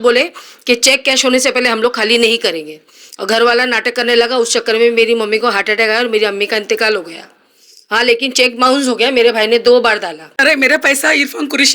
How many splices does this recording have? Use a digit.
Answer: 1